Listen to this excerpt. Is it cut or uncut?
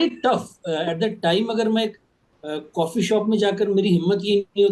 uncut